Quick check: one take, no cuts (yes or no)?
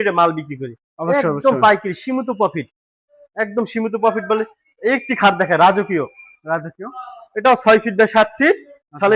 yes